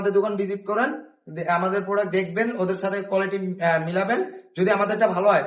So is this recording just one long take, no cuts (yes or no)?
yes